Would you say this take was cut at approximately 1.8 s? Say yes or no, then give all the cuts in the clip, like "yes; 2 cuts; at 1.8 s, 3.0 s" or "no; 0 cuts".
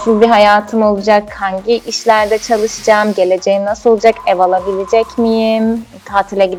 no; 0 cuts